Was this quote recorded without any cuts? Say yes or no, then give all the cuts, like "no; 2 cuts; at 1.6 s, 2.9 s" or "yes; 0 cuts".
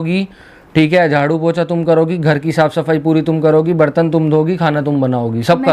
yes; 0 cuts